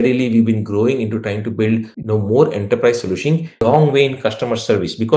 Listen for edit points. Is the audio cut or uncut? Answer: cut